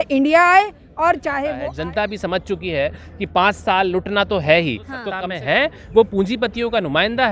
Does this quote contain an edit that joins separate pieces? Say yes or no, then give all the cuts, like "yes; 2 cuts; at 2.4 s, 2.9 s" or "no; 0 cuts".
yes; 2 cuts; at 2.0 s, 5.1 s